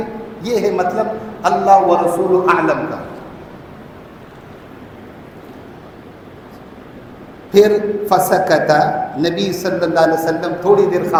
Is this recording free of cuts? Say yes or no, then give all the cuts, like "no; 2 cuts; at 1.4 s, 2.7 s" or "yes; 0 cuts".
yes; 0 cuts